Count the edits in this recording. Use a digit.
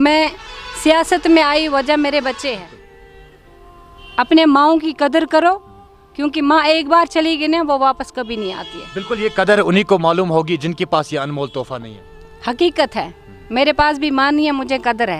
1